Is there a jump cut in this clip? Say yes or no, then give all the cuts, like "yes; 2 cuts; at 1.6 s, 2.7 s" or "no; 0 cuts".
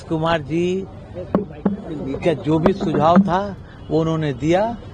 no; 0 cuts